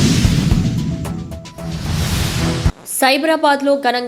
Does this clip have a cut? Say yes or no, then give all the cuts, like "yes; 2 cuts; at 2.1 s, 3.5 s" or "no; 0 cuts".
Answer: yes; 1 cut; at 2.7 s